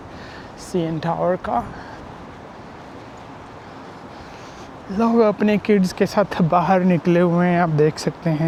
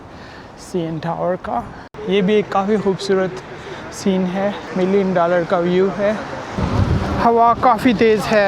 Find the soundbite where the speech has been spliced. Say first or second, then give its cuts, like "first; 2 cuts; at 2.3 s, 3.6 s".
second; 3 cuts; at 1.9 s, 4.6 s, 6.6 s